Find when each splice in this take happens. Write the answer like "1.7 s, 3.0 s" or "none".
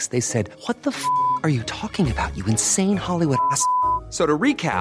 none